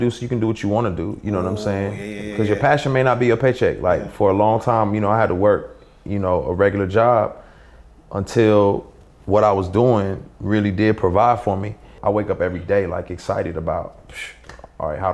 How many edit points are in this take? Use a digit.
1